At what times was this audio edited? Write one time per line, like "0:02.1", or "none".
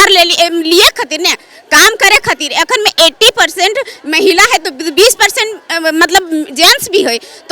none